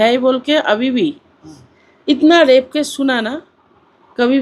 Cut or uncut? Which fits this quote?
uncut